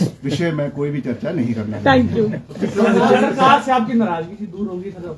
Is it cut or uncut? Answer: uncut